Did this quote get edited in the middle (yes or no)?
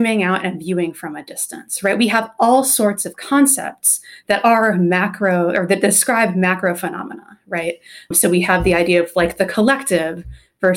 no